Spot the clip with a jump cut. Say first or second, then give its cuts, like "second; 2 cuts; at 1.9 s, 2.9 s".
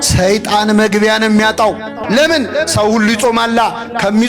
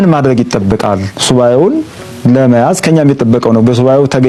first; 1 cut; at 1.9 s